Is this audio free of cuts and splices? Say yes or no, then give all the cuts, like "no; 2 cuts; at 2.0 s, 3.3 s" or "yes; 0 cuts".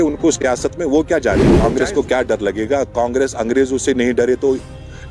no; 1 cut; at 1.5 s